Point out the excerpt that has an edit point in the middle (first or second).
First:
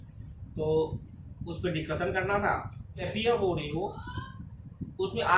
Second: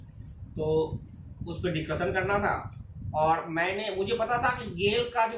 first